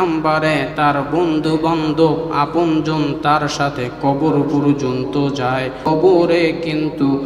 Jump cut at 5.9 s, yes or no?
yes